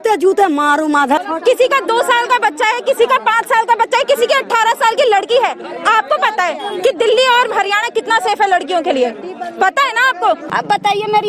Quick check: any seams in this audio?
yes; 2 cuts; at 1.3 s, 10.5 s

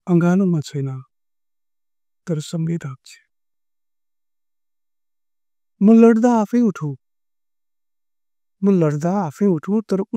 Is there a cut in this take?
no; 0 cuts

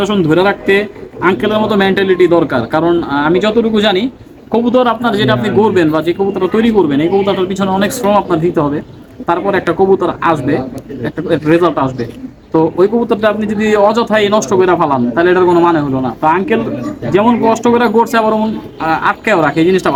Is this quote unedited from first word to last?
yes; 0 cuts

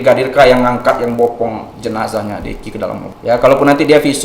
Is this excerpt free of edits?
no; 1 cut; at 3.1 s

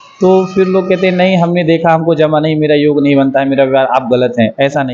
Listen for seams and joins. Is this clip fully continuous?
yes; 0 cuts

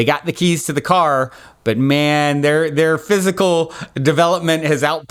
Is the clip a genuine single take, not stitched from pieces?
yes; 0 cuts

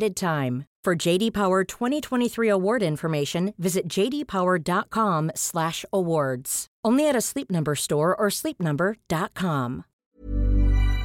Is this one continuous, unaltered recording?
no; 1 cut; at 9.9 s

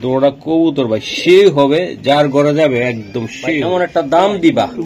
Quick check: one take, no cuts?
no; 1 cut; at 3.6 s

